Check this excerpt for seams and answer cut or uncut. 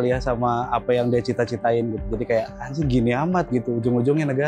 uncut